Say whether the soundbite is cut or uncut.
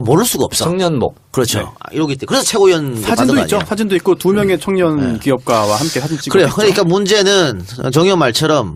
uncut